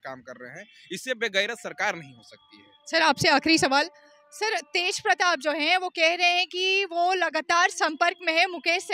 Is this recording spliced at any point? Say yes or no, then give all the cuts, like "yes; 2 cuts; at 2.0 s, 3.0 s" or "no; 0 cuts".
no; 0 cuts